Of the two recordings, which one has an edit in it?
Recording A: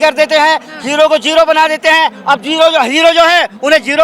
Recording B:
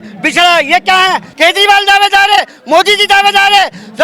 B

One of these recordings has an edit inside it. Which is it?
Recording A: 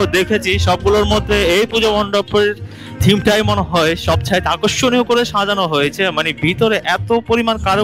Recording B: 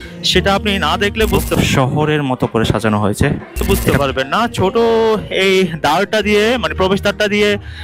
B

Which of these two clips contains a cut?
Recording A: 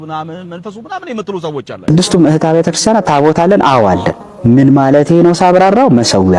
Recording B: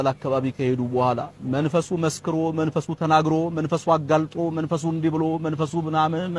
A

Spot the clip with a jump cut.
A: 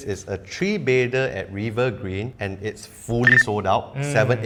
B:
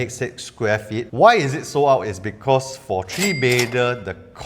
B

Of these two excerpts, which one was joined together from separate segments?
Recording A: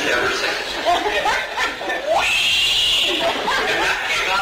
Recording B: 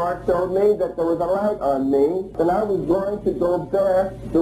B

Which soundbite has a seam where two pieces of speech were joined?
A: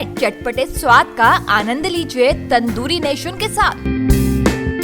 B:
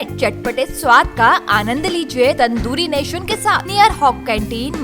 B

